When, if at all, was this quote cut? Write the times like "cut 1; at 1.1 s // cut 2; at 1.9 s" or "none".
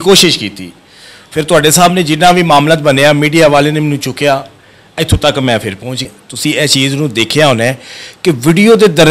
cut 1; at 6.2 s

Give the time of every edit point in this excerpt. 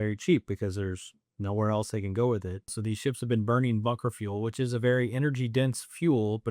cut 1; at 2.7 s

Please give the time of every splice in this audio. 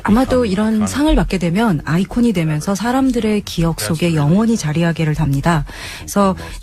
cut 1; at 1.3 s

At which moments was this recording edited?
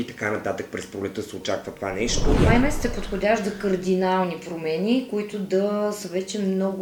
cut 1; at 2.4 s

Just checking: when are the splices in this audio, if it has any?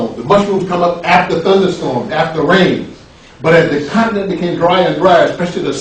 cut 1; at 3.6 s

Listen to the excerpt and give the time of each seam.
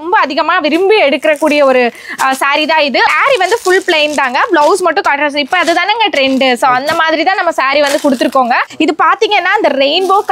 cut 1; at 3.1 s // cut 2; at 8.7 s

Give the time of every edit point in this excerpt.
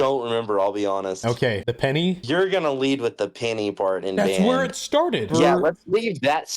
cut 1; at 2.2 s // cut 2; at 5.3 s

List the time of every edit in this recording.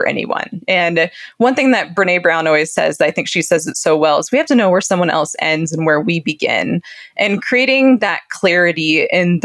none

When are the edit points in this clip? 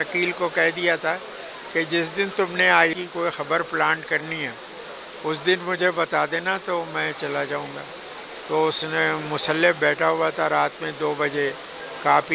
none

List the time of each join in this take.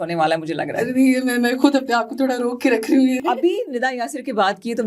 cut 1; at 3.2 s

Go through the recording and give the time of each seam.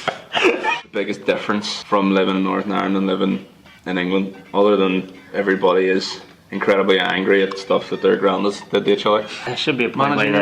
cut 1; at 0.8 s // cut 2; at 1.8 s // cut 3; at 5.3 s // cut 4; at 9.4 s

